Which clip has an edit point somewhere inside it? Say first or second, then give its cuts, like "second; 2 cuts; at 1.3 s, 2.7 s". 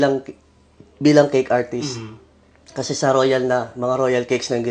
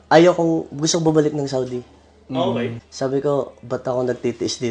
second; 1 cut; at 2.7 s